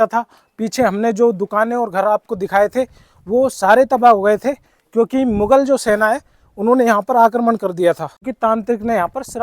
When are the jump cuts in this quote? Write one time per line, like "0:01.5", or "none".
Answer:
0:08.3